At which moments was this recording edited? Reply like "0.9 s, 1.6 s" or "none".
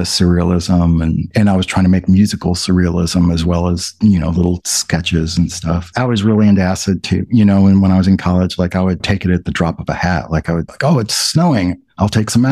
5.9 s